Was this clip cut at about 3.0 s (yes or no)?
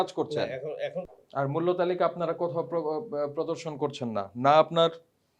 no